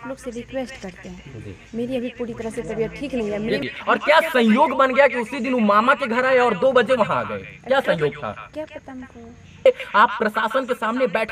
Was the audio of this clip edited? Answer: yes; 2 cuts; at 3.7 s, 9.7 s

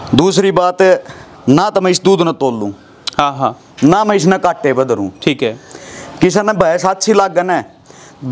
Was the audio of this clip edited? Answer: no; 0 cuts

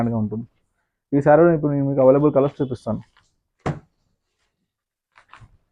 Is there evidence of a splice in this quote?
no; 0 cuts

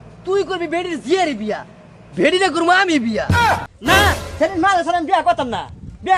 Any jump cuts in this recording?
no; 0 cuts

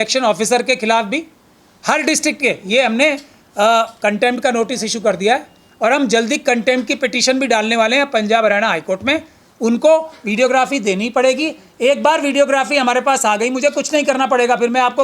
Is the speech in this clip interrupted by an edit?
no; 0 cuts

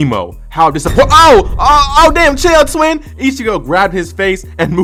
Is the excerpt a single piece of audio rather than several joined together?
yes; 0 cuts

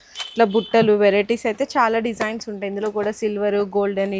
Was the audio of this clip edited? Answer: no; 0 cuts

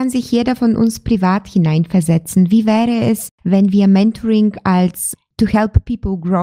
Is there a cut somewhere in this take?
no; 0 cuts

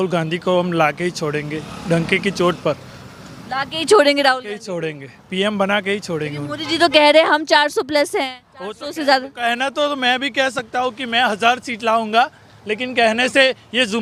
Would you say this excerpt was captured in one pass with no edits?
yes; 0 cuts

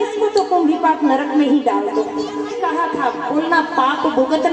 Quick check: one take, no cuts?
no; 1 cut; at 2.5 s

